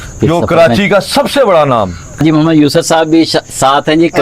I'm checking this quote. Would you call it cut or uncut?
cut